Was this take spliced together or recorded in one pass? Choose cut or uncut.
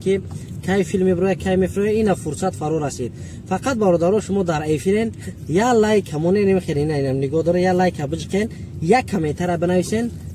uncut